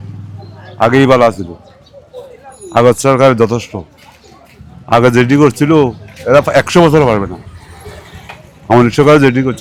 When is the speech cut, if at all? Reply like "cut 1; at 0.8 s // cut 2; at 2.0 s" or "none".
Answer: none